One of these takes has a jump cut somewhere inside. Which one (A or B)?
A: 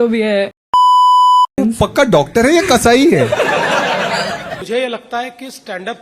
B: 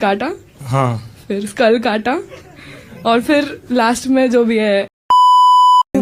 A